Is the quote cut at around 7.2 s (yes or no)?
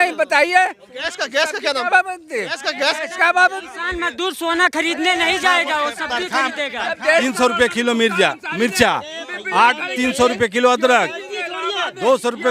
yes